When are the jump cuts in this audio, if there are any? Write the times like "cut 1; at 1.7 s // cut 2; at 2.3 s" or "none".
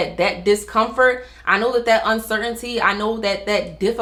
none